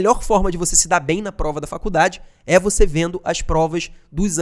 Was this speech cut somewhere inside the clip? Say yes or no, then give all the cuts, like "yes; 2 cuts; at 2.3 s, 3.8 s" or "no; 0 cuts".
no; 0 cuts